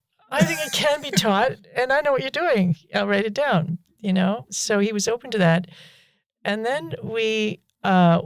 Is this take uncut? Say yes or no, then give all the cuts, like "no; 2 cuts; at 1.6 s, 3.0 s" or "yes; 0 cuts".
yes; 0 cuts